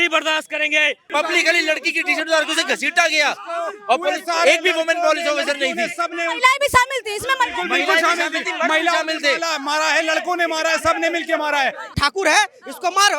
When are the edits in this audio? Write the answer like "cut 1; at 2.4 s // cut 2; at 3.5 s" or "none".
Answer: cut 1; at 1.1 s // cut 2; at 11.9 s